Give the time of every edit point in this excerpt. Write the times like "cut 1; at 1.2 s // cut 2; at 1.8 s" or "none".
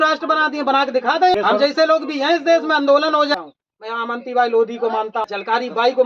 cut 1; at 1.3 s // cut 2; at 3.3 s // cut 3; at 5.3 s

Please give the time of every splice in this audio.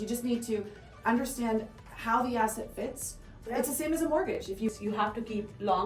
cut 1; at 4.5 s

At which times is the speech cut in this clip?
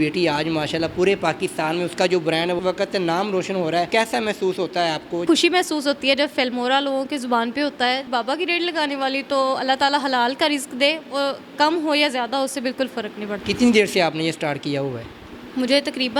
cut 1; at 2.6 s // cut 2; at 3.9 s // cut 3; at 5.2 s // cut 4; at 8.0 s // cut 5; at 13.5 s

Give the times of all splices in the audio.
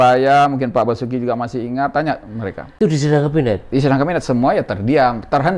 cut 1; at 2.8 s

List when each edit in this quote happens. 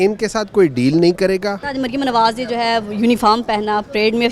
cut 1; at 1.6 s

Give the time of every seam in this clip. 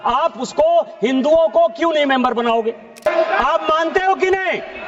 cut 1; at 3.1 s

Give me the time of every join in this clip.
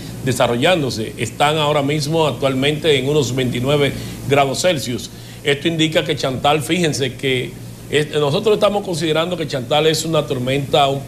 cut 1; at 5.6 s

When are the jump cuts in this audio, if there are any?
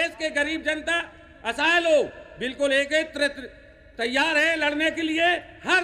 none

